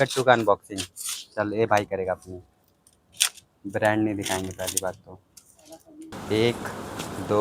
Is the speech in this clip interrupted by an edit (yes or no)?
yes